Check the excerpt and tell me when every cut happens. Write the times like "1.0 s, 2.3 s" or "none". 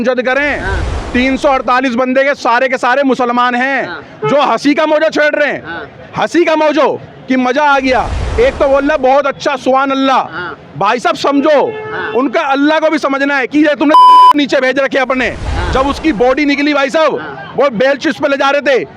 15.5 s